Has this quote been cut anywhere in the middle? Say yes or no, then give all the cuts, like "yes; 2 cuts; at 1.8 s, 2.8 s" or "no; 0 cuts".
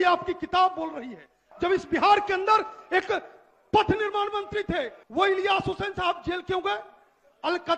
yes; 2 cuts; at 1.4 s, 5.0 s